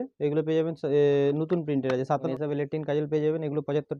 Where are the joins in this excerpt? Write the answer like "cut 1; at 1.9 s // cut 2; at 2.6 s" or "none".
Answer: cut 1; at 2.3 s